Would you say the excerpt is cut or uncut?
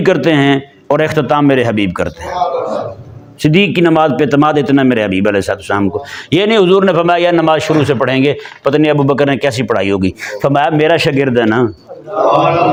uncut